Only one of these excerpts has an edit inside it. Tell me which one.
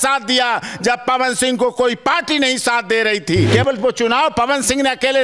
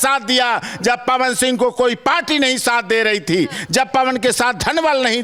first; 1 cut; at 3.5 s

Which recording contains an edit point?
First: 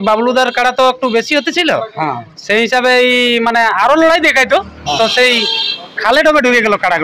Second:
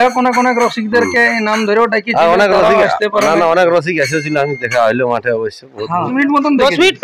second; 1 cut; at 6.1 s

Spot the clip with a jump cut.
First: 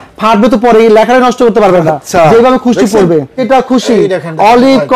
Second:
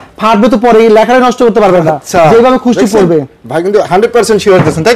first; 1 cut; at 3.4 s

